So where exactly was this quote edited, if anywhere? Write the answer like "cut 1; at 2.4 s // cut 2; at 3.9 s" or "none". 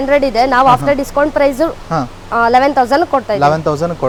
none

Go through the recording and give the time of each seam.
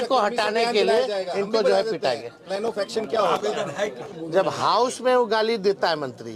cut 1; at 4.1 s

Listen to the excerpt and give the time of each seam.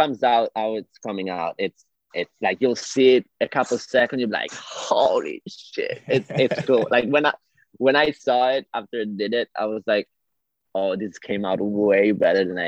none

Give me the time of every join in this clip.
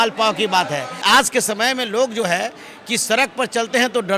cut 1; at 0.9 s

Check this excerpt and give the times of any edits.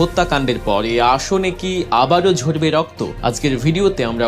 cut 1; at 3.0 s

